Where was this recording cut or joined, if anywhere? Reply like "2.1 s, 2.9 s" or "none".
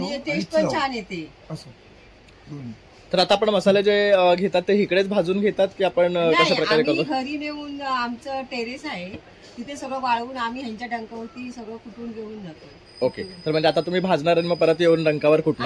none